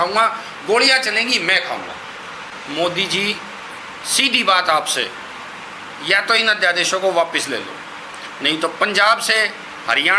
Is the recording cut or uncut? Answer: cut